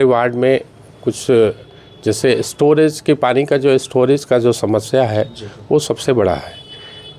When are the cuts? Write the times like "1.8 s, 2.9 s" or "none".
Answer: none